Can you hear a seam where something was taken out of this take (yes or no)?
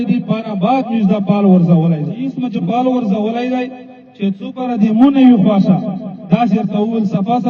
yes